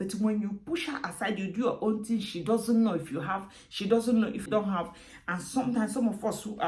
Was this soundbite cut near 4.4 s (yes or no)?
yes